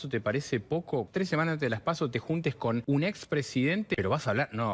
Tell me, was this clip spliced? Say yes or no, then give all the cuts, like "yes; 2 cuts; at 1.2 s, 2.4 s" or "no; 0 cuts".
yes; 3 cuts; at 1.1 s, 2.8 s, 3.9 s